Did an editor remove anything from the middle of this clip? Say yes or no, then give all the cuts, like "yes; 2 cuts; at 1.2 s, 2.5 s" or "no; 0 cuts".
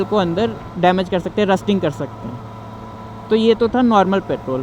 no; 0 cuts